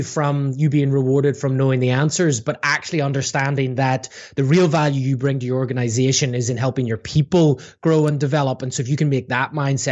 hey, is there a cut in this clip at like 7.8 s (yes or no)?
no